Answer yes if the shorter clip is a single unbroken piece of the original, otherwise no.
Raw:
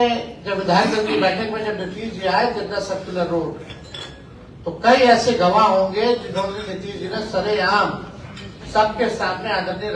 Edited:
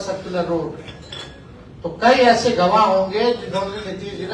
yes